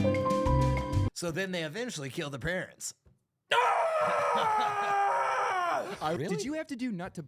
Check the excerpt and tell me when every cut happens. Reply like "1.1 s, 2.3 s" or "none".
1.0 s, 6.2 s